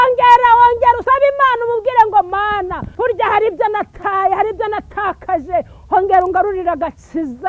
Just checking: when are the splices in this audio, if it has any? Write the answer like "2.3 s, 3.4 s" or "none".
1.0 s, 2.8 s